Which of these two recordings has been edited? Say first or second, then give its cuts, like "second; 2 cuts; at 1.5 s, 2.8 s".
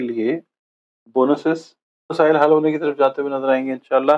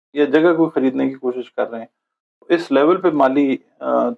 first; 1 cut; at 2.0 s